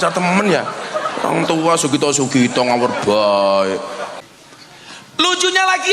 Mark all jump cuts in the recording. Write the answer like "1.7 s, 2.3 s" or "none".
4.1 s